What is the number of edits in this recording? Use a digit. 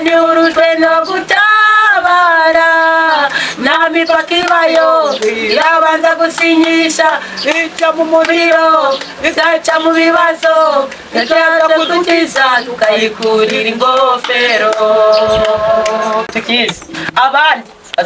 1